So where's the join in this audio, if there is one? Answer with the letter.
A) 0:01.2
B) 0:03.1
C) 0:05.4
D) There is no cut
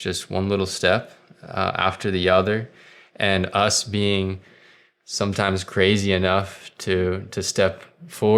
D